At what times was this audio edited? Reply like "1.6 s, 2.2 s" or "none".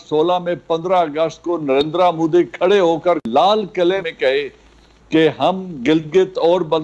3.2 s, 4.1 s